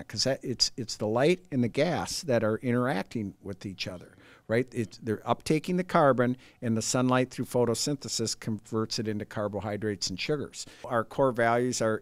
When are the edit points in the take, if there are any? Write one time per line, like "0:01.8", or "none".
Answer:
0:10.9

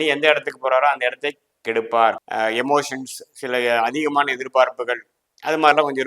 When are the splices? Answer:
0:02.2

